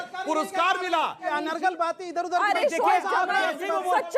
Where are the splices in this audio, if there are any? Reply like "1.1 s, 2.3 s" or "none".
1.2 s